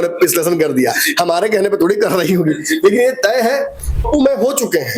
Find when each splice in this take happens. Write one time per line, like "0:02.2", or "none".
0:04.0